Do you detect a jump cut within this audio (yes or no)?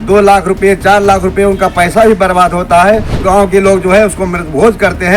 yes